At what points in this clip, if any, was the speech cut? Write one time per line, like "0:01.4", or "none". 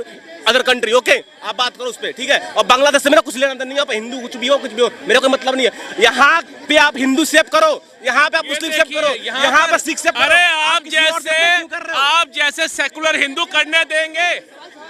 none